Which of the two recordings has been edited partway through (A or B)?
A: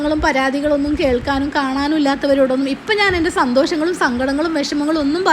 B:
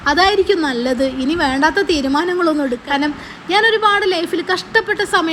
B